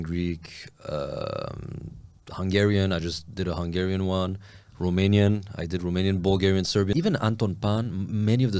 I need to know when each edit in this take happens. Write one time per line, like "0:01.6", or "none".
0:06.9